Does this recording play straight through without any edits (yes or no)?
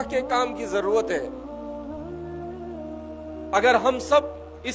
no